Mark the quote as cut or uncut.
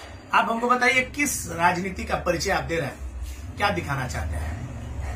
uncut